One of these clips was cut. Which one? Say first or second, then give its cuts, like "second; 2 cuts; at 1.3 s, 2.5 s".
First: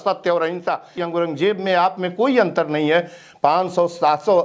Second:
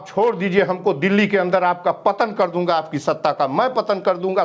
first; 1 cut; at 0.9 s